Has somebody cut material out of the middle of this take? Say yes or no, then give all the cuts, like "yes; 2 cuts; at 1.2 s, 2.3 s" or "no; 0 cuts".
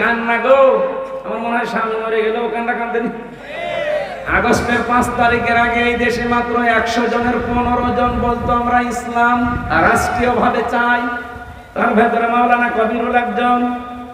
yes; 1 cut; at 4.2 s